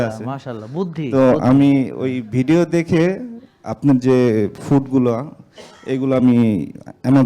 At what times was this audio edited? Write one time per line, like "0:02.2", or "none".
none